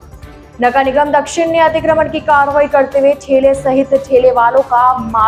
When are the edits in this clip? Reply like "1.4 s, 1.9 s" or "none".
none